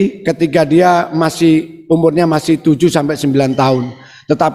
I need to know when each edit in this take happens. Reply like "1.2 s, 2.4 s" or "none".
none